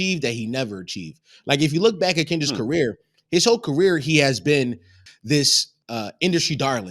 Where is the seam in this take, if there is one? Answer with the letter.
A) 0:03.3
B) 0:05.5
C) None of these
B